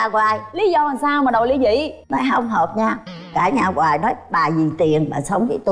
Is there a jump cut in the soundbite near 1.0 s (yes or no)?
no